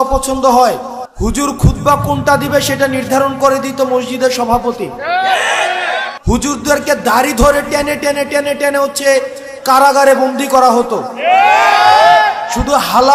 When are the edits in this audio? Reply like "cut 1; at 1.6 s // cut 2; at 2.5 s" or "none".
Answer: cut 1; at 1.0 s // cut 2; at 6.1 s